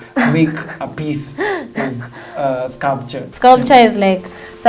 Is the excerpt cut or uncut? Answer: cut